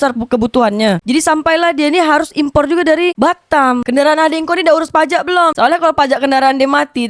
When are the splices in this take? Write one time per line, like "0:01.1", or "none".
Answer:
0:03.9